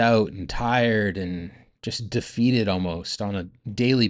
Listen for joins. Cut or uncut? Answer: uncut